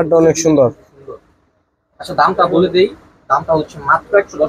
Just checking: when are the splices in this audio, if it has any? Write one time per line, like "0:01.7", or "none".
none